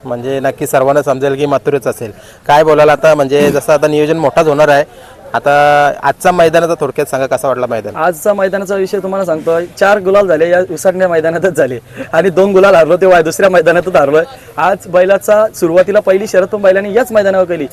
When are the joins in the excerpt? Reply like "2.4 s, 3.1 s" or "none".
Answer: none